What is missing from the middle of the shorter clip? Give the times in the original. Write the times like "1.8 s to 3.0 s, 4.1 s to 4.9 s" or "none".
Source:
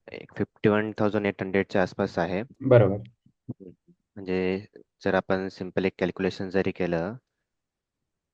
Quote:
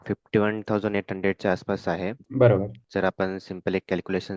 3.1 s to 4.9 s